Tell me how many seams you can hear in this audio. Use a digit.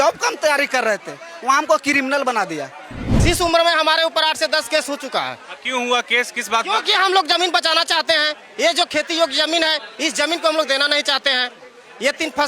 1